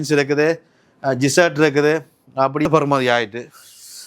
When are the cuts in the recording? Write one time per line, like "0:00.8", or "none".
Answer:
0:02.7